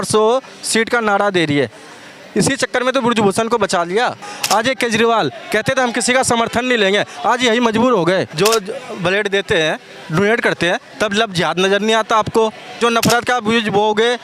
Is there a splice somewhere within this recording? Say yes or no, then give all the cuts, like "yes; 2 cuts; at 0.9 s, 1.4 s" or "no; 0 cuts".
yes; 3 cuts; at 4.3 s, 8.3 s, 12.8 s